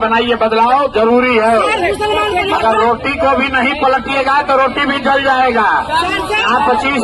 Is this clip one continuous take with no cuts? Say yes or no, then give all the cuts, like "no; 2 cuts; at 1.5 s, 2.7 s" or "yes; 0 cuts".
yes; 0 cuts